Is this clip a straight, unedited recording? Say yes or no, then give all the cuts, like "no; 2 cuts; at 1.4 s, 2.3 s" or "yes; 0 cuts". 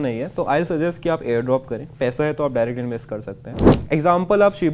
no; 1 cut; at 3.7 s